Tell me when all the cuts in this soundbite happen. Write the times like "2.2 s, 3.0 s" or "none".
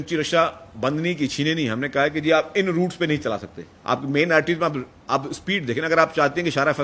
3.2 s